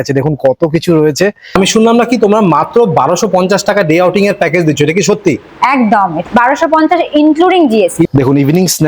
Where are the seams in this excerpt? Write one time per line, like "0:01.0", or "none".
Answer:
0:01.5
0:06.2
0:08.1